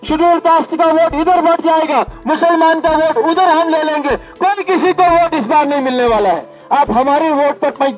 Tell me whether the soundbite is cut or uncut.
uncut